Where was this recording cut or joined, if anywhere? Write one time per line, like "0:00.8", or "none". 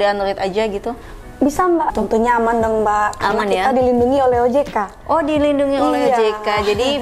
0:01.9